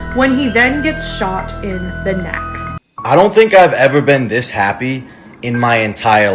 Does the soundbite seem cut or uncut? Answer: cut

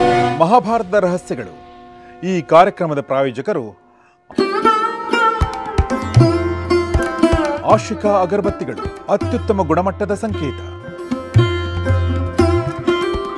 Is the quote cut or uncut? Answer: uncut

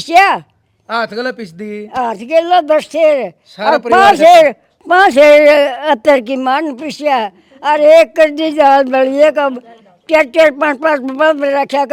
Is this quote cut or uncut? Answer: uncut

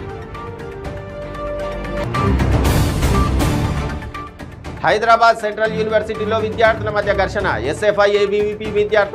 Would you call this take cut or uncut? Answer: cut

